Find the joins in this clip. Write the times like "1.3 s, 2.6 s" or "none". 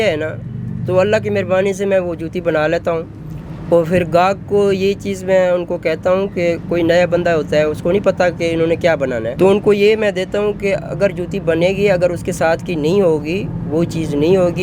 9.3 s